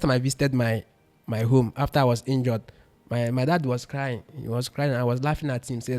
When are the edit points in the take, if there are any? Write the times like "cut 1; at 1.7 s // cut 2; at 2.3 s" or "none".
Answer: none